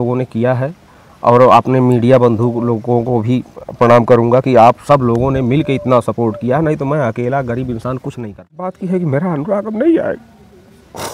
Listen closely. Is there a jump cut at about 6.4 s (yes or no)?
no